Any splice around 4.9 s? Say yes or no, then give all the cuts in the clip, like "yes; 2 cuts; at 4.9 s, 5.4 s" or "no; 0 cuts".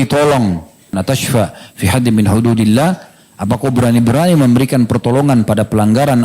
no; 1 cut; at 0.9 s